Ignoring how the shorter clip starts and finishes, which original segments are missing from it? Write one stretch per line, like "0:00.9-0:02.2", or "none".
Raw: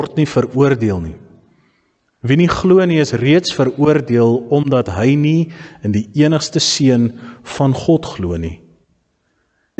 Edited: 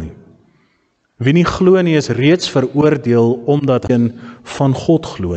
0:04.9-0:06.9